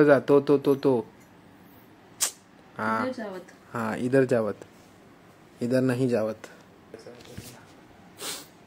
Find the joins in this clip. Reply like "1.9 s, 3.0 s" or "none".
6.9 s